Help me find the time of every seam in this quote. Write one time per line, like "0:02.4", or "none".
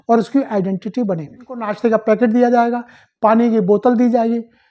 0:01.7